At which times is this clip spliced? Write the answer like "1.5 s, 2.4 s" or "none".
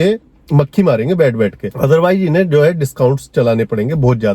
none